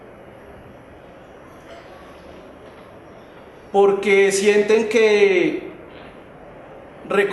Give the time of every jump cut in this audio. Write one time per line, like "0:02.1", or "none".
0:03.0